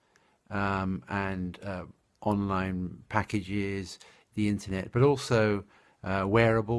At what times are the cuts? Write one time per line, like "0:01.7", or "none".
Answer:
0:04.6